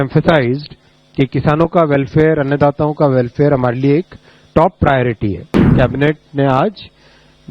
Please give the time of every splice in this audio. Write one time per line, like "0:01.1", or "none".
0:05.7